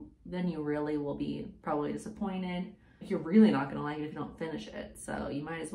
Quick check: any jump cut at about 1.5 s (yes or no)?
no